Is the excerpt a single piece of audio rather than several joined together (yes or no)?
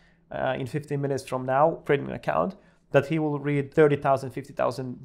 no